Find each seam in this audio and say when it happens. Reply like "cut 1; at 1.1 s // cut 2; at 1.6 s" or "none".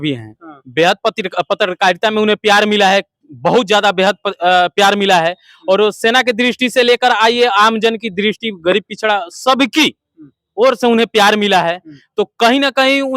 none